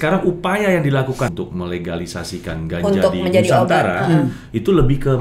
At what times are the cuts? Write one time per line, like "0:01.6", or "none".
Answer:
0:01.3